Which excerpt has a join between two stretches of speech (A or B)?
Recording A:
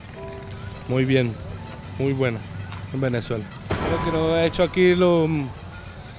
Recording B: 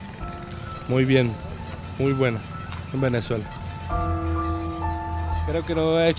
A